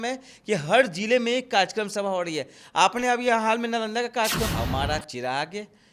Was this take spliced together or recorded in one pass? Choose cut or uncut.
cut